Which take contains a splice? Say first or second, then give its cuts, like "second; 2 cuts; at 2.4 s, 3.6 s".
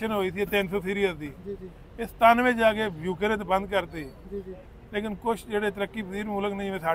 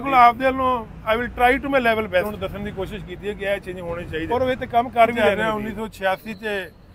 second; 3 cuts; at 2.2 s, 4.3 s, 5.2 s